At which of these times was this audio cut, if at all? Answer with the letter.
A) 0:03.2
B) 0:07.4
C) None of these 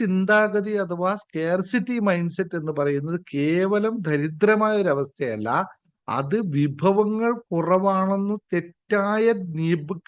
C